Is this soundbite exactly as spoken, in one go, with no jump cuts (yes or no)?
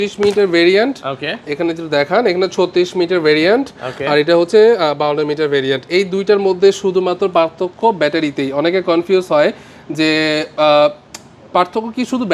yes